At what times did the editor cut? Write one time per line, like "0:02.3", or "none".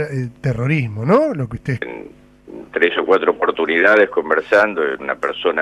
none